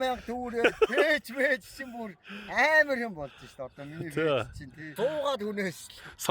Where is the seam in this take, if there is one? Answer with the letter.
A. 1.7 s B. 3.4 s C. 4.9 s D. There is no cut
C